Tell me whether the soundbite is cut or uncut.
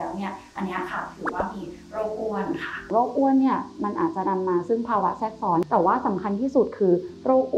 cut